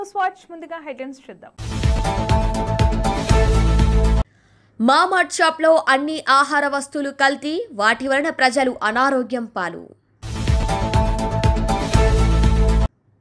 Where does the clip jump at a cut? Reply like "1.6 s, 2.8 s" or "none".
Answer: 1.6 s